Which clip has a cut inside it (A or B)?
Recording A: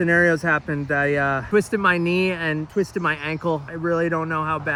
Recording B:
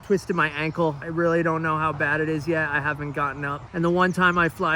B